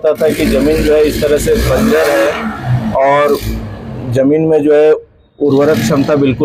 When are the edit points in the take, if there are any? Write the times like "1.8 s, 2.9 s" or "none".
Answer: none